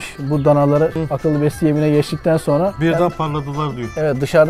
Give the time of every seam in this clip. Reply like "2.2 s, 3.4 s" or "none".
0.9 s, 2.8 s